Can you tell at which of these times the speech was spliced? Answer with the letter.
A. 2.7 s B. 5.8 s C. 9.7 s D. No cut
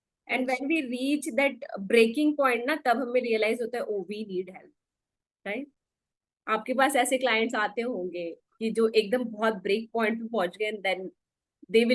D